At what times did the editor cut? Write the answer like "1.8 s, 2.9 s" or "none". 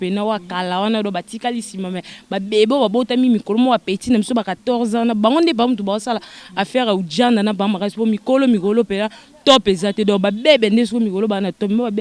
none